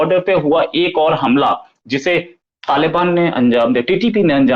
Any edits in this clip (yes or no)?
no